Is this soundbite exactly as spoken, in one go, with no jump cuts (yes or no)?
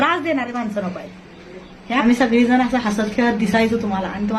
no